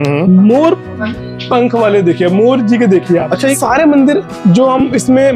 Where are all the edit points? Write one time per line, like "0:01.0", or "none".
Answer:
0:03.6